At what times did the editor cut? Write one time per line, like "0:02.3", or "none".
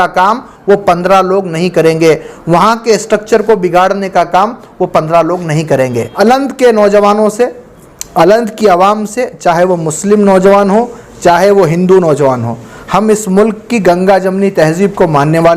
0:06.1